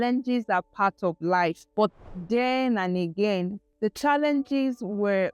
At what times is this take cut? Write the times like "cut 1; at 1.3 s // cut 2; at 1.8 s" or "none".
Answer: cut 1; at 1.6 s // cut 2; at 3.6 s